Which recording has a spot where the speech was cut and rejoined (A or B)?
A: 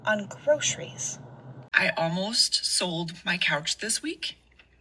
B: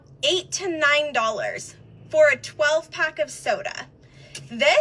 A